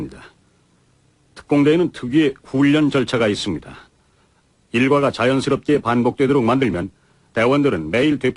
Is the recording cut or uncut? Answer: cut